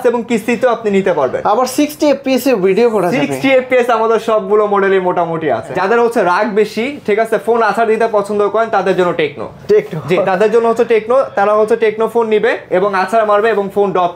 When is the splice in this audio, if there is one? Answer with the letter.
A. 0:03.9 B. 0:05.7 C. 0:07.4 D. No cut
B